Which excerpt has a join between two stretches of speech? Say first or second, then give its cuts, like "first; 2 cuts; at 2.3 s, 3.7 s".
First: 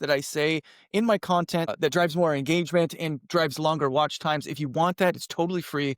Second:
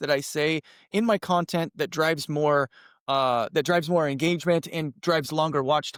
first; 1 cut; at 1.7 s